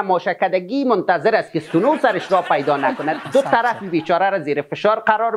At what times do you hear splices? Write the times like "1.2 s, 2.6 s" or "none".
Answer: 3.2 s